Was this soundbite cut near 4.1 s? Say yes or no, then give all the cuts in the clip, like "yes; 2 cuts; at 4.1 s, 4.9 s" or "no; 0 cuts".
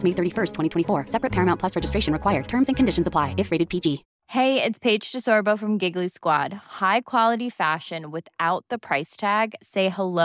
yes; 1 cut; at 4.1 s